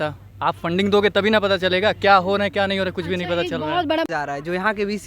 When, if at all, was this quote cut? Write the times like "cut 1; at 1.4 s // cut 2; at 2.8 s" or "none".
cut 1; at 4.1 s